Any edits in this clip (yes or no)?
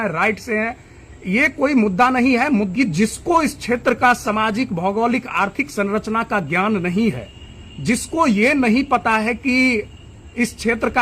yes